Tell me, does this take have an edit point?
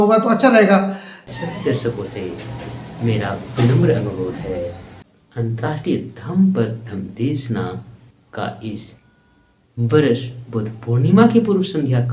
yes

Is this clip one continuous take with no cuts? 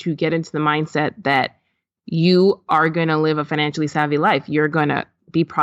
yes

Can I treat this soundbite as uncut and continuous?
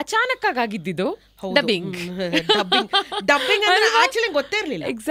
yes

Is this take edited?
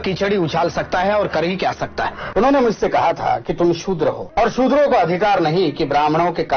yes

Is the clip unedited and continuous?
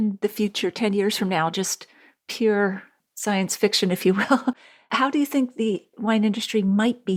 yes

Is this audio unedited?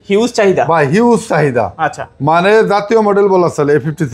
yes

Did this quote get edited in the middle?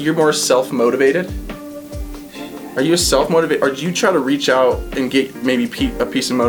no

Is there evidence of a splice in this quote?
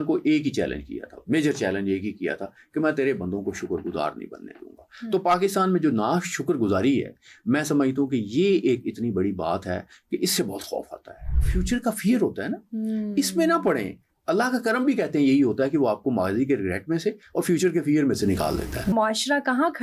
yes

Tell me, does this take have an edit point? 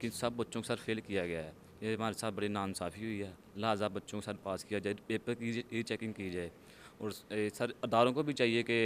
no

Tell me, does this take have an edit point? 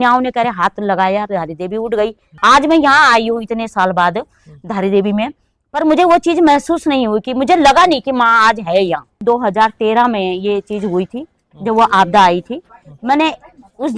yes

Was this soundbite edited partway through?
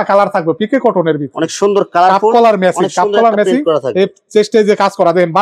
no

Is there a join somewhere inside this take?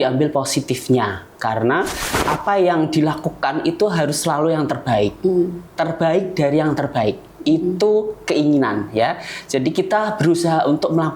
yes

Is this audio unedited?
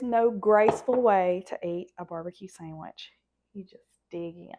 yes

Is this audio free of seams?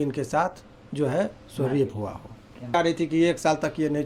no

